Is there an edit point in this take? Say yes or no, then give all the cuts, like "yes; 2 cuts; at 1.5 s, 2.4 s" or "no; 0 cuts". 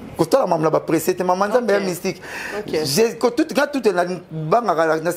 no; 0 cuts